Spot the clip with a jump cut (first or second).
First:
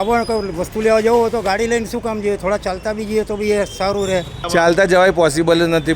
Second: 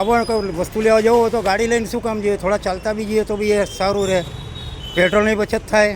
first